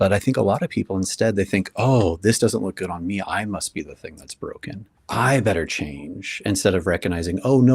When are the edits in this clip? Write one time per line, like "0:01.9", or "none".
0:04.9